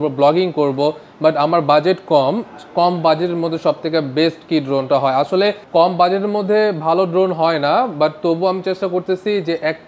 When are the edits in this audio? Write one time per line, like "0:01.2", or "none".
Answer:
none

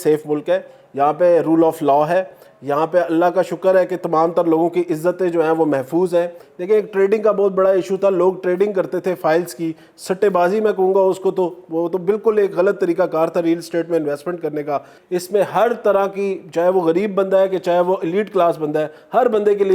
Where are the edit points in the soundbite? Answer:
0:06.5
0:14.9

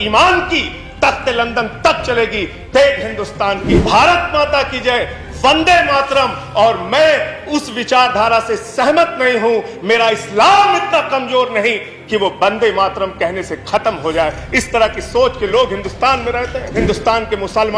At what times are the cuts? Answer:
0:03.7
0:16.7

